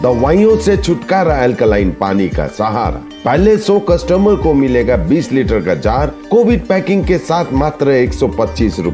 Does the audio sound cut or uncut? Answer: uncut